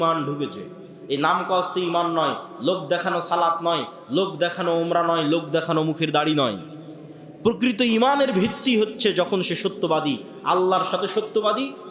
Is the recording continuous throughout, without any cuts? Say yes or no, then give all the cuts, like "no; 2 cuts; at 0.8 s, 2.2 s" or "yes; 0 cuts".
yes; 0 cuts